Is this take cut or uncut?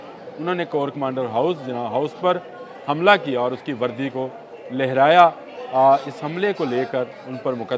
uncut